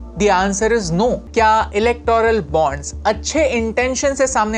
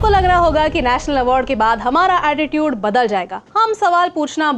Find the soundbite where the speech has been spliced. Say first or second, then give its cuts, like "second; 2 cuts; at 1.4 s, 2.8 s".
first; 1 cut; at 1.2 s